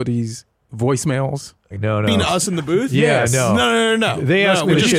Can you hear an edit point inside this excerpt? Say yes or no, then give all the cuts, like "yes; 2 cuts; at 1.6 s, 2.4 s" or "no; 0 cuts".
yes; 1 cut; at 1.7 s